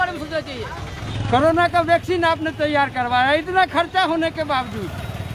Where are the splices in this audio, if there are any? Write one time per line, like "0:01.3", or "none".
0:01.0